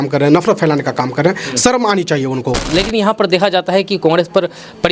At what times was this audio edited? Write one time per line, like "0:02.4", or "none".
0:02.7